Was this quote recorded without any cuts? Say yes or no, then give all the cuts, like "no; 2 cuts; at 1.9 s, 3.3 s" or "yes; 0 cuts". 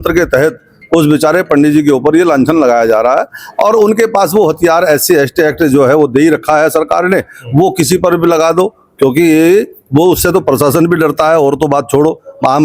yes; 0 cuts